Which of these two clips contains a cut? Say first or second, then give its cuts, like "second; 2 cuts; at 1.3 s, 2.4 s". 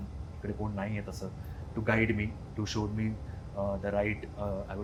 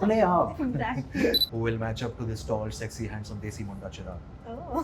second; 1 cut; at 1.4 s